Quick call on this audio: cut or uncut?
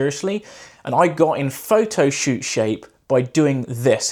uncut